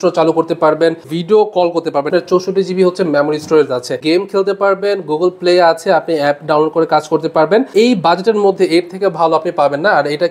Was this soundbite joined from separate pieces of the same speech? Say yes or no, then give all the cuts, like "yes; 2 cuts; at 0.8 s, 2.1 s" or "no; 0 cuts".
yes; 4 cuts; at 1.1 s, 2.1 s, 4.0 s, 7.7 s